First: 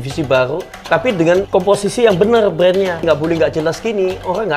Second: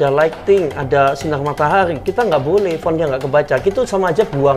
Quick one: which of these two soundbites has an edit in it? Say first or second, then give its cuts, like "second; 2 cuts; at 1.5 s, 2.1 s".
first; 2 cuts; at 1.5 s, 3.0 s